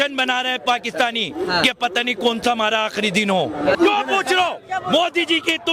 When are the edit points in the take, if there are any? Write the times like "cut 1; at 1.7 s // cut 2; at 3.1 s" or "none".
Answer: cut 1; at 3.8 s